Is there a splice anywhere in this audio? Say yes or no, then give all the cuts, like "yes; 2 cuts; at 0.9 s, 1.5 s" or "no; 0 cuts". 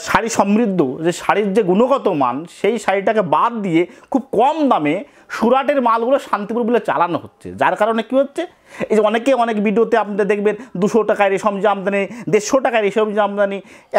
no; 0 cuts